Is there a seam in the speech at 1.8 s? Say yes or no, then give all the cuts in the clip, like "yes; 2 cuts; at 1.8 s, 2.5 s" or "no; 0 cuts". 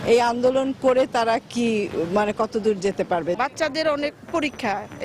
no; 1 cut; at 3.4 s